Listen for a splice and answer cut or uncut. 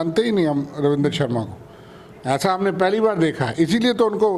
uncut